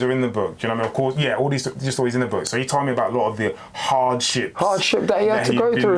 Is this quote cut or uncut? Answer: uncut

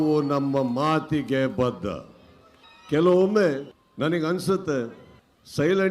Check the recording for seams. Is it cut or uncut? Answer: cut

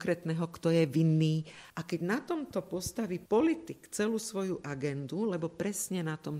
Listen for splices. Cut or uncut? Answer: uncut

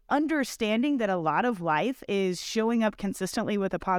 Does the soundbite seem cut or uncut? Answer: uncut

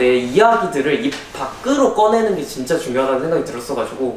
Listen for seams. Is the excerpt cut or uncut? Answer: uncut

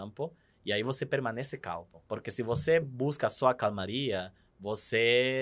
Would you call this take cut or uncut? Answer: cut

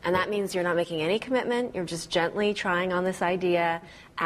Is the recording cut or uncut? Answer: uncut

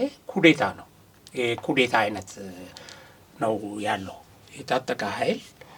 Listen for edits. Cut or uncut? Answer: uncut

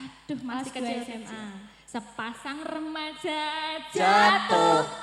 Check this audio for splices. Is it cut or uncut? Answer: uncut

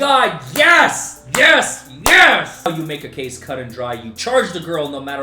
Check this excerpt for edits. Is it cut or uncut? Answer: cut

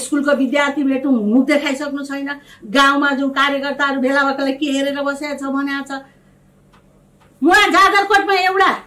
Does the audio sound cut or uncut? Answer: uncut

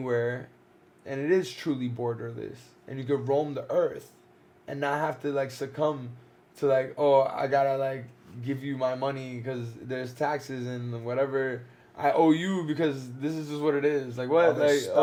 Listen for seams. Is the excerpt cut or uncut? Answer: uncut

